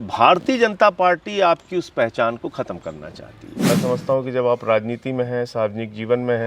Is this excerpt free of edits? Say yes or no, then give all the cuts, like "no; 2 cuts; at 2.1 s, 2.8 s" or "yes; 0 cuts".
no; 1 cut; at 3.7 s